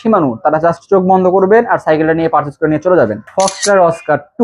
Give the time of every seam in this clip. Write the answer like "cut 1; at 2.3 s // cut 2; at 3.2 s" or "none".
cut 1; at 3.3 s

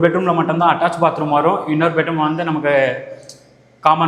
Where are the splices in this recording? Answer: none

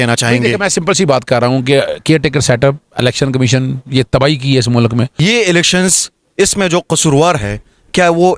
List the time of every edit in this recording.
cut 1; at 5.1 s

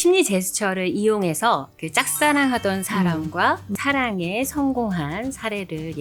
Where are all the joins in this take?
none

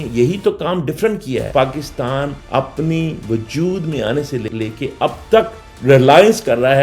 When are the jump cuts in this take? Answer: cut 1; at 1.5 s

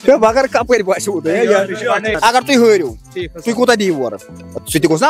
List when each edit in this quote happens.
cut 1; at 2.1 s

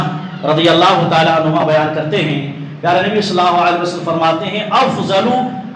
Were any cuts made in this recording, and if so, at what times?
none

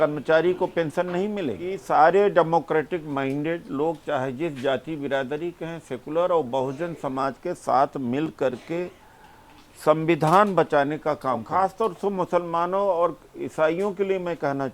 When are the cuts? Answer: cut 1; at 1.7 s // cut 2; at 11.5 s

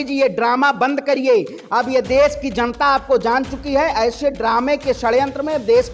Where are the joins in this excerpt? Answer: none

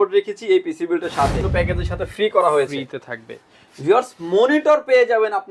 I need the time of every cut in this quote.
cut 1; at 1.5 s

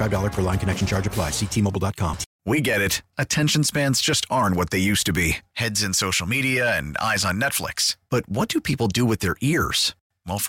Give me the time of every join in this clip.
cut 1; at 2.3 s

